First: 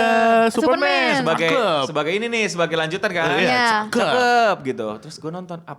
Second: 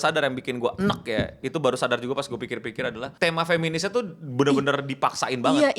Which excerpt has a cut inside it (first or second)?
second